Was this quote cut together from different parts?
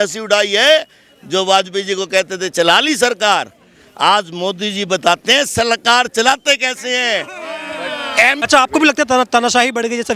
yes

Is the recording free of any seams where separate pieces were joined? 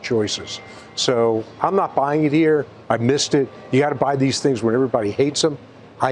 yes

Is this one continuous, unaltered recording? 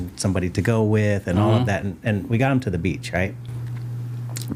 yes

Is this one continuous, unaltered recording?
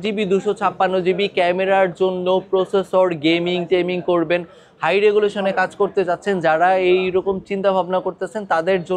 yes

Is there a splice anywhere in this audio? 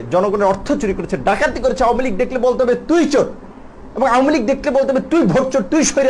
no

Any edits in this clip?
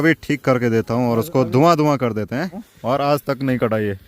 yes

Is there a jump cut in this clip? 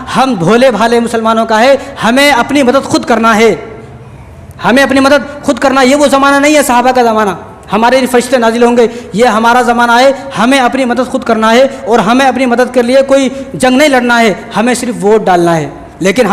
no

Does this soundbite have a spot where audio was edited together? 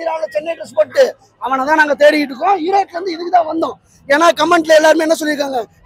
no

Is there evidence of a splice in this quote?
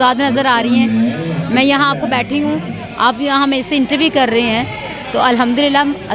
no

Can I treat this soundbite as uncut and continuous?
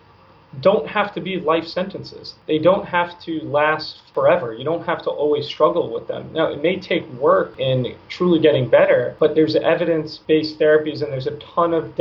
no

